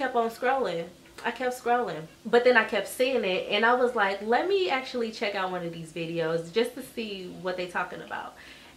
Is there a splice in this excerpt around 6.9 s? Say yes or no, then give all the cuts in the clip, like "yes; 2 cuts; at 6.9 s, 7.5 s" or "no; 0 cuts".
no; 1 cut; at 2.1 s